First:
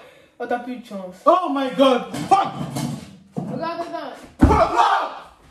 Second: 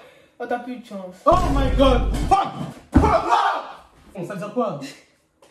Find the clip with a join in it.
second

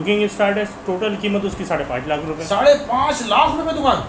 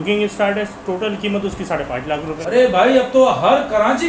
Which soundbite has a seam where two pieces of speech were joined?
second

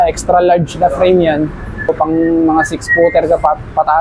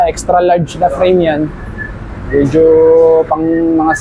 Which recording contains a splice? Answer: first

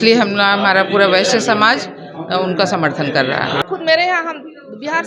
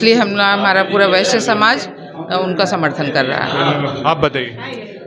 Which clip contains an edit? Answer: first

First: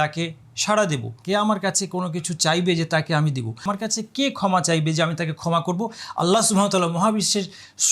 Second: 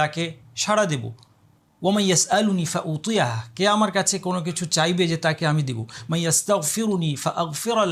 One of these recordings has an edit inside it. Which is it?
first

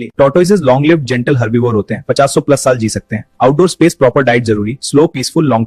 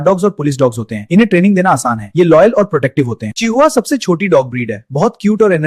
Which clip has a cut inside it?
second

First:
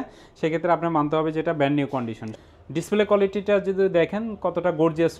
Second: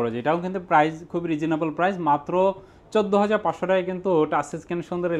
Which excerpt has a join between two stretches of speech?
first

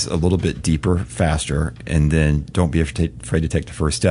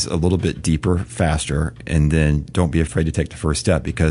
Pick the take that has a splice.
second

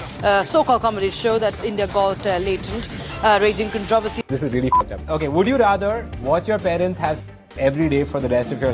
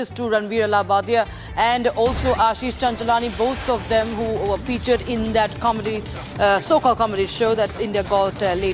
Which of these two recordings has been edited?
first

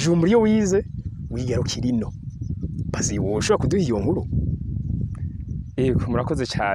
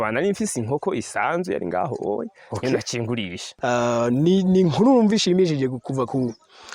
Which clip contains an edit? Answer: second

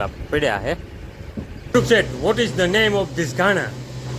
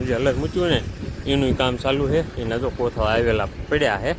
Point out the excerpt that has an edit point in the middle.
first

